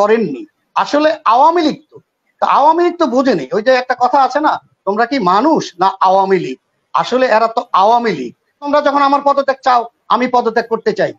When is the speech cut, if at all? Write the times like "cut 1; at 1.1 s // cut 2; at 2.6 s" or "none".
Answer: cut 1; at 8.7 s

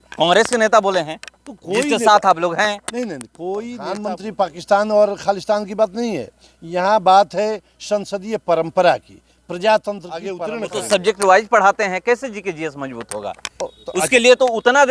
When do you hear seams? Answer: cut 1; at 4.0 s // cut 2; at 10.3 s

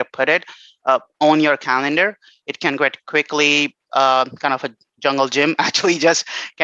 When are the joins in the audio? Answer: none

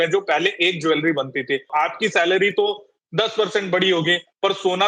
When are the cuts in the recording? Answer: cut 1; at 1.7 s

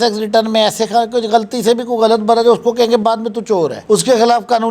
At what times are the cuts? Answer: none

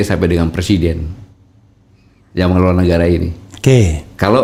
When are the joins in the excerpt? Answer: none

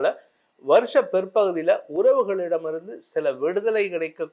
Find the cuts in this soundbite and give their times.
none

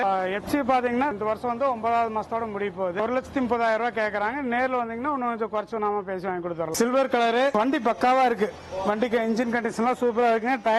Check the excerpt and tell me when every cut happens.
cut 1; at 1.1 s // cut 2; at 3.0 s // cut 3; at 6.7 s

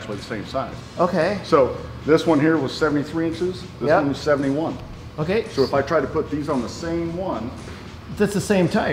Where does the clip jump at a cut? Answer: none

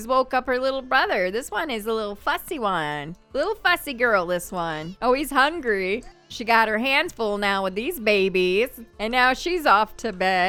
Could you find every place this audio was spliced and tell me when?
none

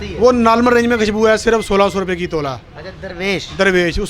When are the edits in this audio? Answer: none

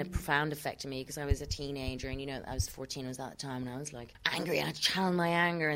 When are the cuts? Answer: cut 1; at 4.1 s

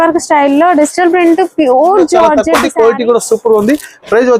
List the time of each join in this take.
cut 1; at 2.4 s

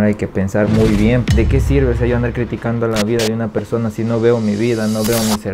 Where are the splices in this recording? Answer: cut 1; at 1.2 s

